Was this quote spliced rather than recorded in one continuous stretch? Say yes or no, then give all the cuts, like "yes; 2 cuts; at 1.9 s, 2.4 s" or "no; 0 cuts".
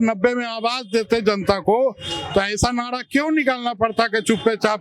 no; 0 cuts